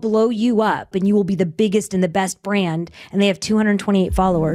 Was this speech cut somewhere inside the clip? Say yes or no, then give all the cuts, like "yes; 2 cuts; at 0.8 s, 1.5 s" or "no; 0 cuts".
yes; 1 cut; at 0.9 s